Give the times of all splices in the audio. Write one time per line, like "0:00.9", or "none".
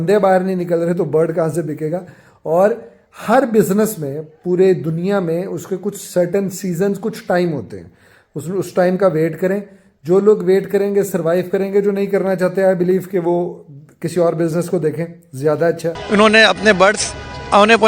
0:15.9